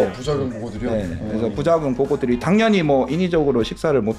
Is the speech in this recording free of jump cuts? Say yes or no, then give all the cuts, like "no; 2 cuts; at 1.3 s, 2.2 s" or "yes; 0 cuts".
yes; 0 cuts